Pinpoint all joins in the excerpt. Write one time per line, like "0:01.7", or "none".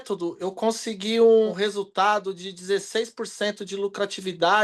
0:01.5